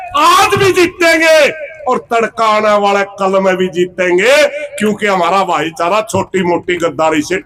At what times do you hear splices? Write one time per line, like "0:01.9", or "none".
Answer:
none